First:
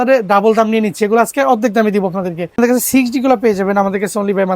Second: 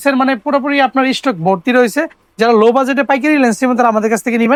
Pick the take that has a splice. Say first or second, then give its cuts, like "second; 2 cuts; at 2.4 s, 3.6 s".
first; 1 cut; at 2.6 s